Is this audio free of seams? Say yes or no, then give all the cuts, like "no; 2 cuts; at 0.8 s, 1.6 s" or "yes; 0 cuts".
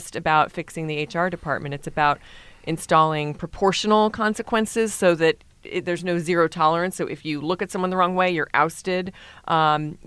yes; 0 cuts